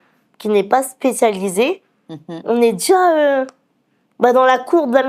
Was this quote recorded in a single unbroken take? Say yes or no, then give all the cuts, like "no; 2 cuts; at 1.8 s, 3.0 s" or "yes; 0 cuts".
yes; 0 cuts